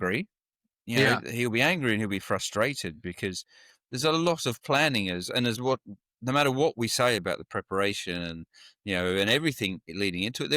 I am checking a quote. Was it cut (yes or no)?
no